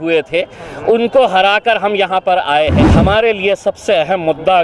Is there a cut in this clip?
yes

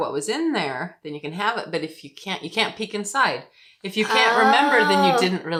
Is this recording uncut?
yes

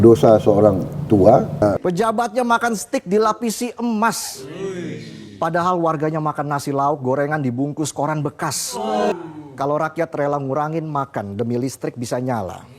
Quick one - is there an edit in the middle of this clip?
yes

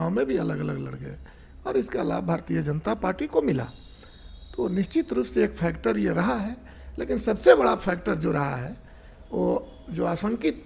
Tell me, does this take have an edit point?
no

